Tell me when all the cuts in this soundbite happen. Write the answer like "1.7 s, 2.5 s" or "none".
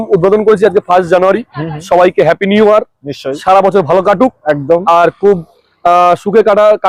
none